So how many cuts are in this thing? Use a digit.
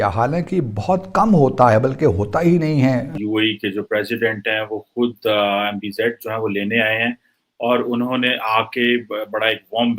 1